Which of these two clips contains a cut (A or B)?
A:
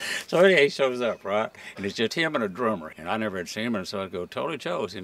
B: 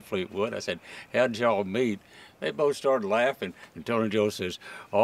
A